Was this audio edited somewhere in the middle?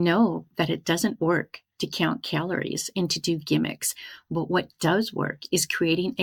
no; 0 cuts

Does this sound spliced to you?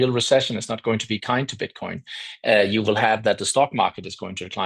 no; 0 cuts

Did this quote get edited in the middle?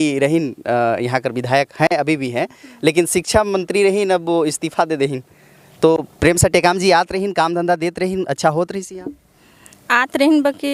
no; 0 cuts

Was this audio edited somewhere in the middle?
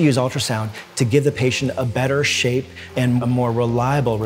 yes; 1 cut; at 3.0 s

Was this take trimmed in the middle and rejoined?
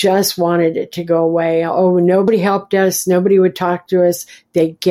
yes; 1 cut; at 2.3 s

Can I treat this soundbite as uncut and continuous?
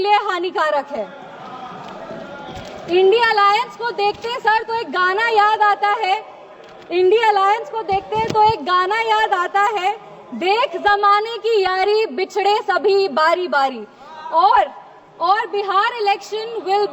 yes; 0 cuts

